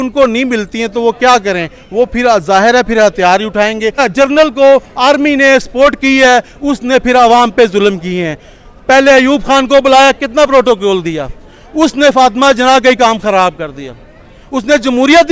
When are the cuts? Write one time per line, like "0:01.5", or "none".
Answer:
0:04.0